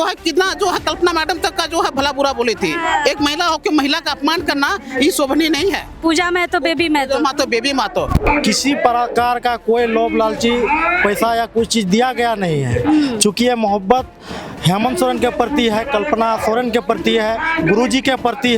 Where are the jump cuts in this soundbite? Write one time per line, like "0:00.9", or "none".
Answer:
0:08.2

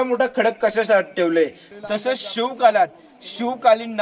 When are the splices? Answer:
0:01.6

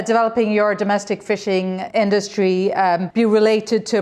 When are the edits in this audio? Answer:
0:01.8
0:03.1

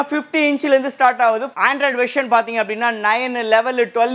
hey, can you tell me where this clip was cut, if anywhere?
0:01.5

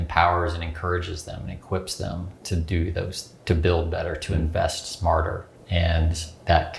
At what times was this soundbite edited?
0:05.5

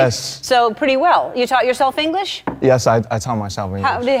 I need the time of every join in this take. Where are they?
none

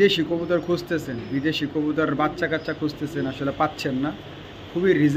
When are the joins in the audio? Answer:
none

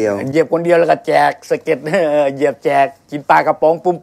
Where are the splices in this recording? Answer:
0:03.1

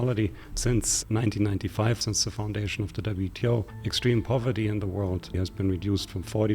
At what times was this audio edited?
0:00.8
0:02.0
0:03.8
0:05.4

